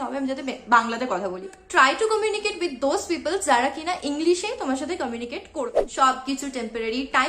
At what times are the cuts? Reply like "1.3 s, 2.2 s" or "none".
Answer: 1.6 s, 5.9 s